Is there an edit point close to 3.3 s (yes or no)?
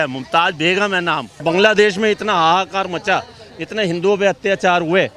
no